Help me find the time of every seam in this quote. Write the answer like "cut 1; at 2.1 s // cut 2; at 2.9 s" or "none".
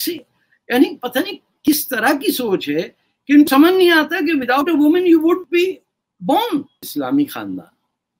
cut 1; at 6.9 s